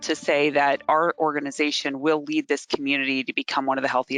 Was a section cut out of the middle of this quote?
no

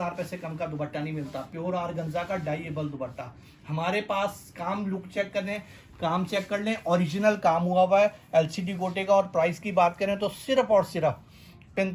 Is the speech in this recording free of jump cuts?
yes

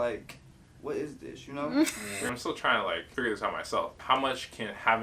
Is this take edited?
yes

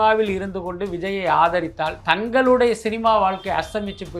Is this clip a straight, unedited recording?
no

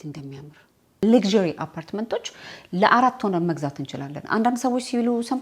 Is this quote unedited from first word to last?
no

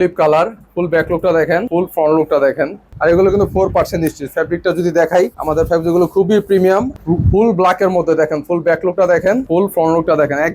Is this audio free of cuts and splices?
no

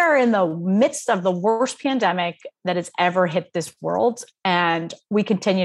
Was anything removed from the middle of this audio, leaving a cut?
no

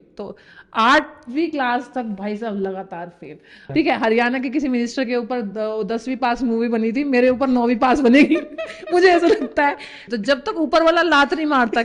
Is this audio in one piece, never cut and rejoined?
no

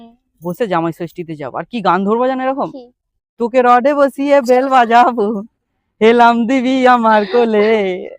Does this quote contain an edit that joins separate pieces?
no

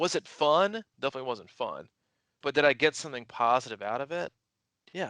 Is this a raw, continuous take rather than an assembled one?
no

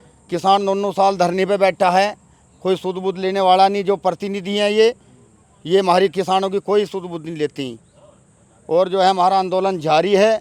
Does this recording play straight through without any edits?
yes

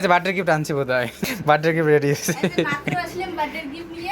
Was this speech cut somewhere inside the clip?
yes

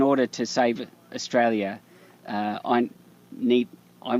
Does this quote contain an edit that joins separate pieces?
no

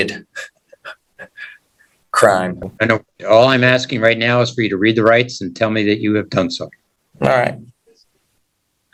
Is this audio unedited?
yes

